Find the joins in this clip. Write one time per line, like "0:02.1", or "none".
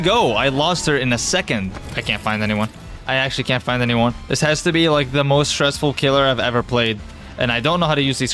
0:01.8
0:04.2
0:07.2